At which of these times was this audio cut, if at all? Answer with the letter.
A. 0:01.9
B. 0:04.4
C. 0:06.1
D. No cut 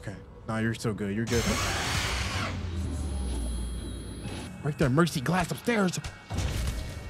B